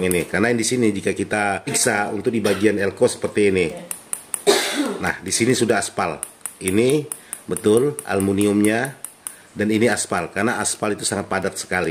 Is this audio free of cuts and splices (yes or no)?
no